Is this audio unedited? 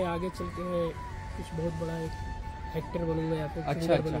yes; 0 cuts

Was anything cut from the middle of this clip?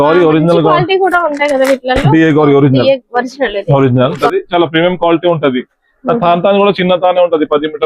yes; 1 cut; at 4.2 s

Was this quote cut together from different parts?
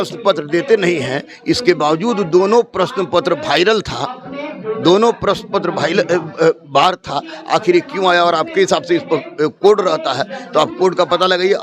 no; 0 cuts

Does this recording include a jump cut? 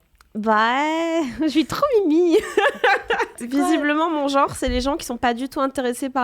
yes; 1 cut; at 3.4 s

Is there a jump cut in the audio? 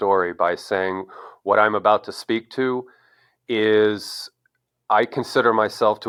no; 0 cuts

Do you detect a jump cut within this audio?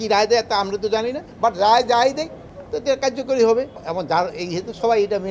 yes; 2 cuts; at 1.2 s, 3.8 s

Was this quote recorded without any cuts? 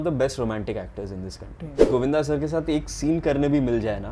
no; 1 cut; at 1.9 s

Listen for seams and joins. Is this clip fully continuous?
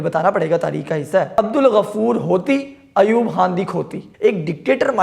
no; 2 cuts; at 1.3 s, 4.0 s

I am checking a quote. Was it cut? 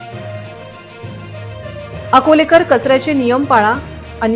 no; 0 cuts

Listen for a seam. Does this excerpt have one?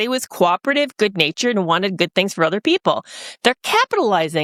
no; 0 cuts

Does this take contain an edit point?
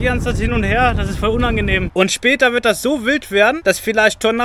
yes; 2 cuts; at 1.9 s, 3.6 s

